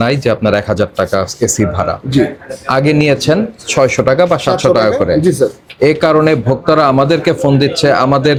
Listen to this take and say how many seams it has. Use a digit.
0